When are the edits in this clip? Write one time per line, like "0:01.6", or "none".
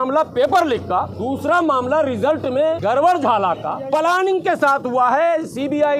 0:01.2
0:02.8
0:03.7